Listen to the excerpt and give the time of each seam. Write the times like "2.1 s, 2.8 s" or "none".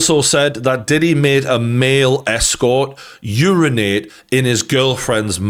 none